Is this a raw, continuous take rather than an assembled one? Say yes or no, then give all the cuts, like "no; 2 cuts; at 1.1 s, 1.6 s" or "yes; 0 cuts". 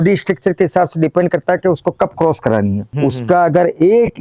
no; 1 cut; at 2.9 s